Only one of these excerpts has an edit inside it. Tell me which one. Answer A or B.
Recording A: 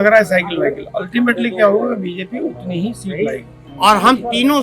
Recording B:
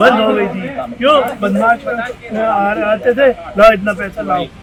A